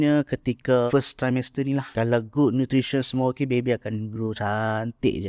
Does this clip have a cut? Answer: yes; 2 cuts; at 0.9 s, 1.9 s

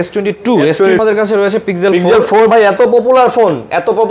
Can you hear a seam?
yes; 1 cut; at 1.0 s

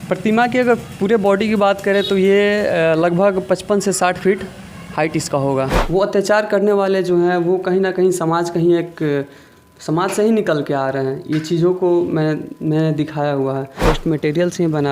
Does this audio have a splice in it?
yes; 2 cuts; at 5.8 s, 13.8 s

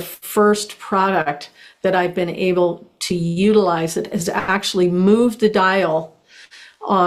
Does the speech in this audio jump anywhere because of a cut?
no; 0 cuts

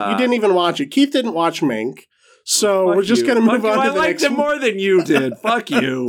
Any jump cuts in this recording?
no; 0 cuts

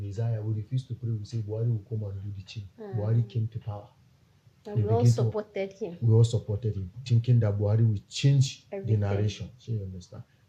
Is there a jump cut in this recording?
no; 0 cuts

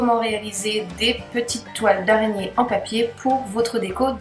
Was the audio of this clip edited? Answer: no; 0 cuts

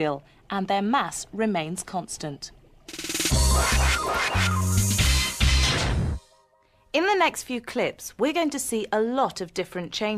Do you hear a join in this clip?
yes; 1 cut; at 6.9 s

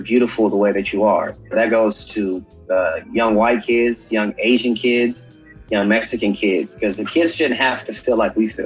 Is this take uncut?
yes; 0 cuts

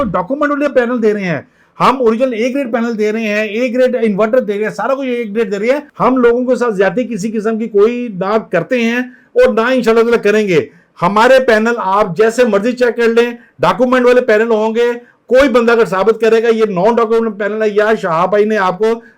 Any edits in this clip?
yes; 1 cut; at 5.9 s

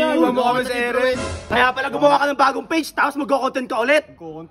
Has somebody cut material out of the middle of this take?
yes; 1 cut; at 1.3 s

